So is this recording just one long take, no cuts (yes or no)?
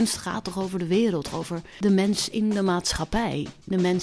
no